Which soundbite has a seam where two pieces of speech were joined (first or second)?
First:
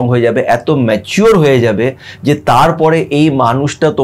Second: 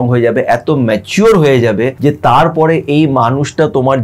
second